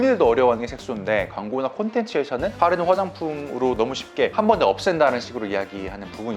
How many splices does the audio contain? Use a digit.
0